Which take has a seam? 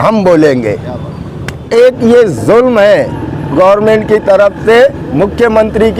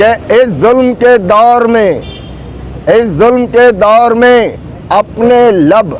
first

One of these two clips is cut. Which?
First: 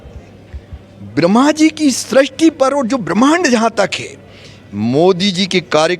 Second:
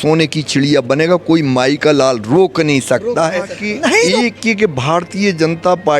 second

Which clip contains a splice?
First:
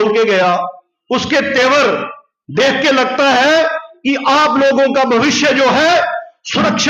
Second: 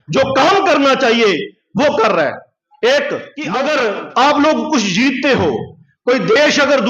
second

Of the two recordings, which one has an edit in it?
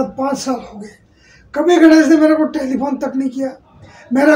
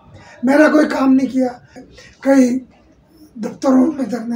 second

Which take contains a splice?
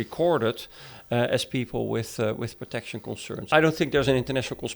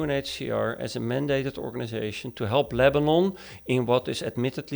first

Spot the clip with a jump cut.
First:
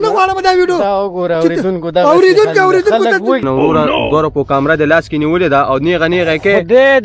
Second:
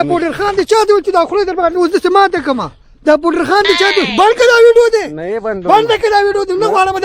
first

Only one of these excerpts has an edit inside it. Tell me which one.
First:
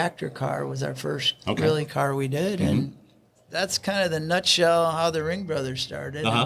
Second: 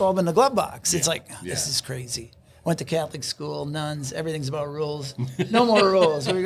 first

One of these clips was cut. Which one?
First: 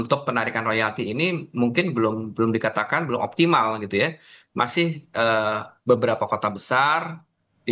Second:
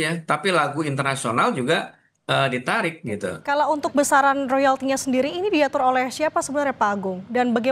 second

